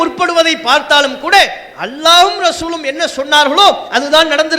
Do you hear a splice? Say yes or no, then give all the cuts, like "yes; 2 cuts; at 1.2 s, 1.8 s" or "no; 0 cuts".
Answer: no; 0 cuts